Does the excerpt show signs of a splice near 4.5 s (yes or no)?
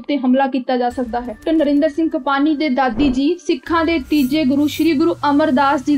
no